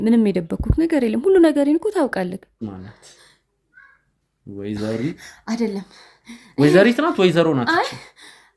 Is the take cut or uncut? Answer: cut